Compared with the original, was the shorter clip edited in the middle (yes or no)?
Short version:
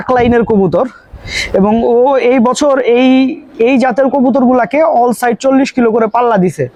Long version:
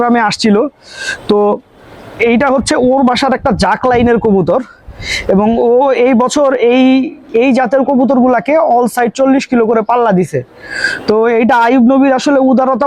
no